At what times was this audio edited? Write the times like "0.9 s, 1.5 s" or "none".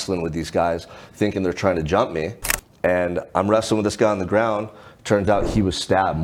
none